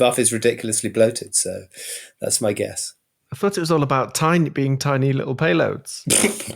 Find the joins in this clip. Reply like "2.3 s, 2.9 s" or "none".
none